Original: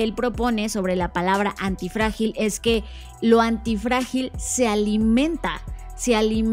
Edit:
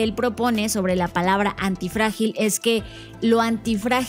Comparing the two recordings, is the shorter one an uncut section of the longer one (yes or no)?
yes